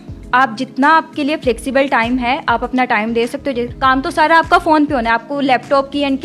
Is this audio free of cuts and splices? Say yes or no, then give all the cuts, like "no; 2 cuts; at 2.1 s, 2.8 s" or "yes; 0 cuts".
no; 1 cut; at 3.7 s